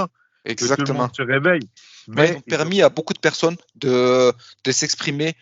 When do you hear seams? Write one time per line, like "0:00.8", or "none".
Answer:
0:02.5